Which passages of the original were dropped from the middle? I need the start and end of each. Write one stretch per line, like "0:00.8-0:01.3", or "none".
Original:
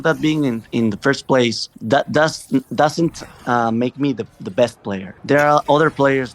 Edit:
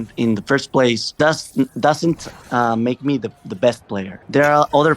0:01.7-0:02.1